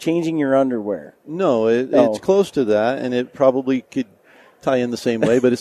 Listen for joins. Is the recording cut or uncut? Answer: uncut